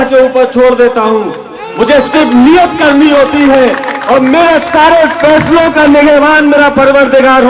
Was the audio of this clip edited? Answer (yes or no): no